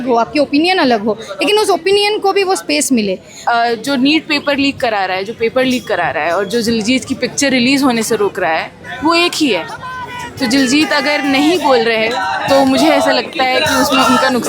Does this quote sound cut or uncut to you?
cut